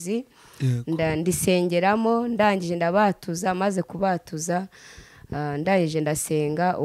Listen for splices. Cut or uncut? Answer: uncut